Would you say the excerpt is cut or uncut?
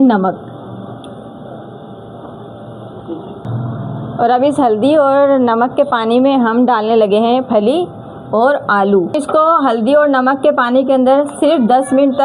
cut